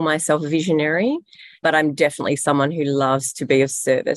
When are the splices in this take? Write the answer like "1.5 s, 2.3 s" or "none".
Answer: 1.6 s